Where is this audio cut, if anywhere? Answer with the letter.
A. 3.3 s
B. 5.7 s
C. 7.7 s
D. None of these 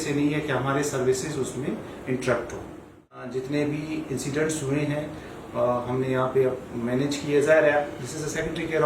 A